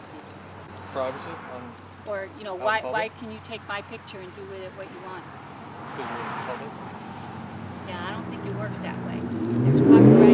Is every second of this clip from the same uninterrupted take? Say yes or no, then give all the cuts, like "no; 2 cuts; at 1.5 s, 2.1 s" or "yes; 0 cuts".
yes; 0 cuts